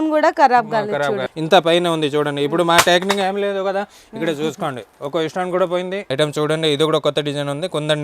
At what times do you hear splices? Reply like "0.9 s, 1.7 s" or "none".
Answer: 1.3 s, 6.0 s